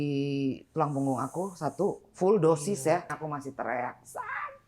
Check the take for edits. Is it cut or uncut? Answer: cut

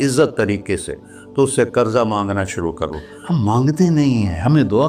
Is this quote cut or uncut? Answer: cut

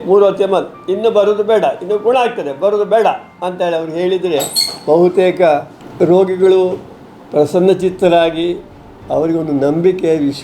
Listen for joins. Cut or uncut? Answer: cut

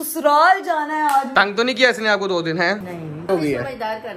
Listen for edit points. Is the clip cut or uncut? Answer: cut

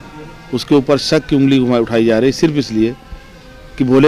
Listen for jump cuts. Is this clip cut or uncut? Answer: uncut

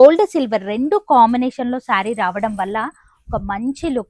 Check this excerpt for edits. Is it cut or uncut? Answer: uncut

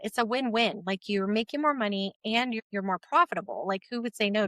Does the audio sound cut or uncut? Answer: cut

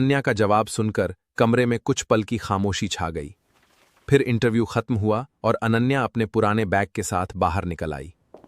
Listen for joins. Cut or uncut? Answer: uncut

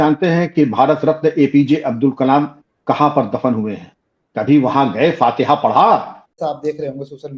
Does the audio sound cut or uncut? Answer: cut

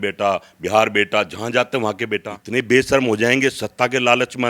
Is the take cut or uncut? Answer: cut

